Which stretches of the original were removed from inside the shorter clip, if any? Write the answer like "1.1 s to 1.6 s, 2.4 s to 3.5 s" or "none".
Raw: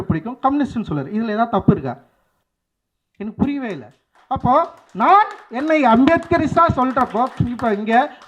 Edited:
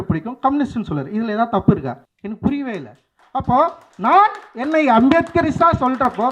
2.1 s to 3.1 s